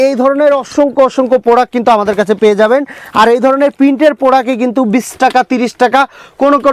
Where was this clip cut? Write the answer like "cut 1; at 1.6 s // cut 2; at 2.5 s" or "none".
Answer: none